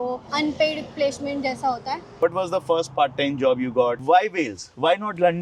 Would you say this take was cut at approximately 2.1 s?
yes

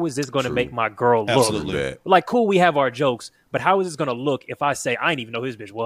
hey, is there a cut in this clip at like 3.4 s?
no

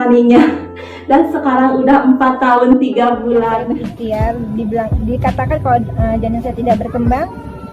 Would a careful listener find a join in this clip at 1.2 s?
no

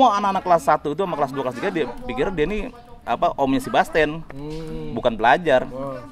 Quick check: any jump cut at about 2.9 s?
no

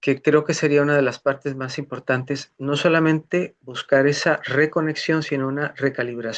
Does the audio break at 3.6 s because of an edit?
no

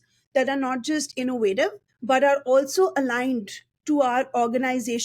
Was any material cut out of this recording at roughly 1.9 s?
yes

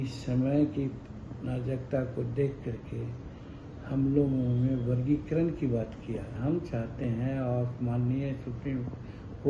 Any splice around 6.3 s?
yes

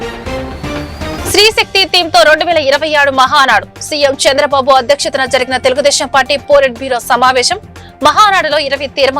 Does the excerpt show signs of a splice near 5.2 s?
no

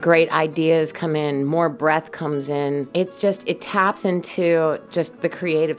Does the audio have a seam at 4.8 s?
no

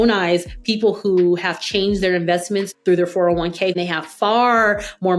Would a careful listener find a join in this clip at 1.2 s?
no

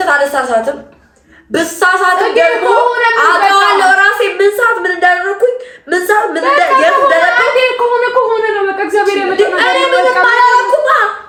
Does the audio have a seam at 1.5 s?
no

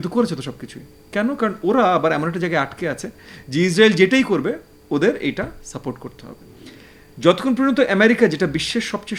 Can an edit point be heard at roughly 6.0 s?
no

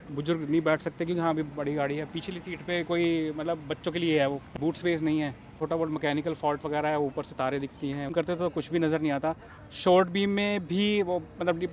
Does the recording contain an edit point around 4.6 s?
yes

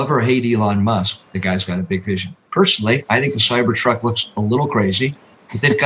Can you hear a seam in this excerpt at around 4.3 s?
no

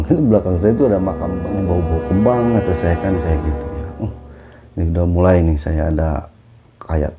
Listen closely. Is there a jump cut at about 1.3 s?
yes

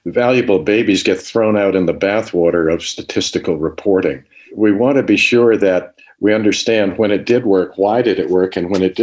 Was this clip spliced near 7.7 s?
no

